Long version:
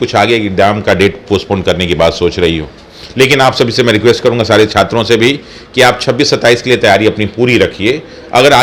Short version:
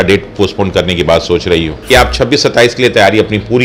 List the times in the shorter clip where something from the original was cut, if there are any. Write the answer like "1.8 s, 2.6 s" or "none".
1.7 s